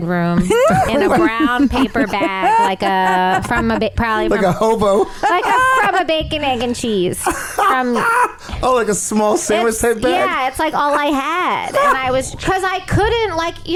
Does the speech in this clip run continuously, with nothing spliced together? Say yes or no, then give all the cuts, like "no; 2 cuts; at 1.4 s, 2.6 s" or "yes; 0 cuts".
yes; 0 cuts